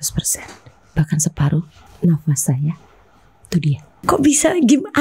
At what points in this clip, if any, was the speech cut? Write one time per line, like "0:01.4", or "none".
0:01.8
0:04.0